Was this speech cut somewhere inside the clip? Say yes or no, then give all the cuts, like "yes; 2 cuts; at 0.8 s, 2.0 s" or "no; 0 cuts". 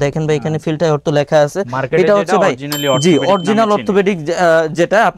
no; 0 cuts